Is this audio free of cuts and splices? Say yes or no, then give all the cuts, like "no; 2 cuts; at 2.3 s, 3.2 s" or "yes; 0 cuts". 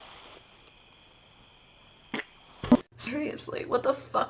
no; 1 cut; at 2.7 s